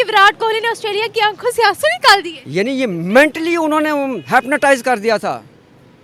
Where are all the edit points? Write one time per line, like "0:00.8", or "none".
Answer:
none